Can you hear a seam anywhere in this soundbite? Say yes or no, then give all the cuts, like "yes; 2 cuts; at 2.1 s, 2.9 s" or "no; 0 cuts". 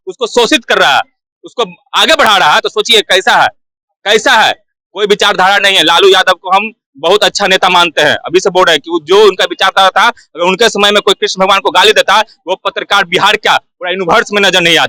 no; 0 cuts